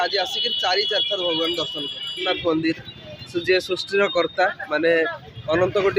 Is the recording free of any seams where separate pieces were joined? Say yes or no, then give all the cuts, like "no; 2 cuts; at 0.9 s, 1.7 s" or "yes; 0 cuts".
no; 1 cut; at 2.2 s